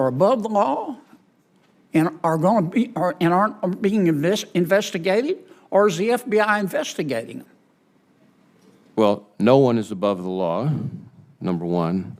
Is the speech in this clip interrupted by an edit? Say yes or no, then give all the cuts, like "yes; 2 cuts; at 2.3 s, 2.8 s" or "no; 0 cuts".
no; 0 cuts